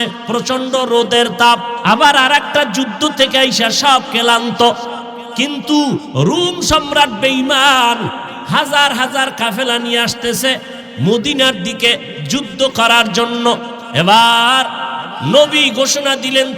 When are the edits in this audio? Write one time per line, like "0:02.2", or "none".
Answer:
0:01.7
0:13.8